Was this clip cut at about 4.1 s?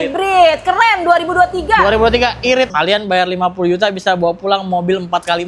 no; 1 cut; at 2.7 s

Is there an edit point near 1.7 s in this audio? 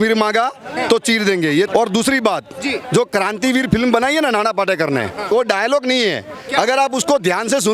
yes; 2 cuts; at 1.7 s, 5.3 s

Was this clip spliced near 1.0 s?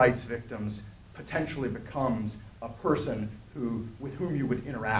no; 1 cut; at 3.0 s

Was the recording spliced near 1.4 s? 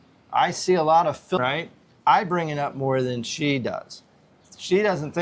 yes; 1 cut; at 1.4 s

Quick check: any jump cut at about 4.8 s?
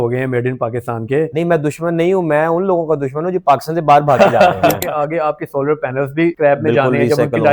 yes; 1 cut; at 4.8 s

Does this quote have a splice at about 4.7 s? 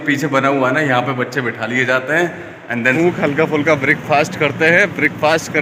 no; 1 cut; at 3.0 s

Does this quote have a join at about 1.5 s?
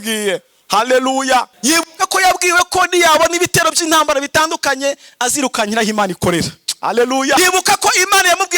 yes; 2 cuts; at 1.5 s, 7.4 s

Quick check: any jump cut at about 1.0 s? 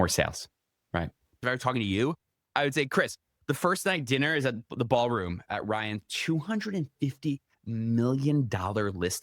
yes; 1 cut; at 1.0 s

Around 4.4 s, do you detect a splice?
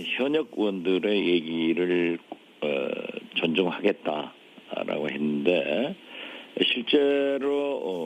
no; 1 cut; at 1.9 s

